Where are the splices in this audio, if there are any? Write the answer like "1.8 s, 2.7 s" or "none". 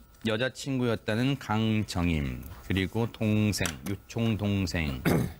1.6 s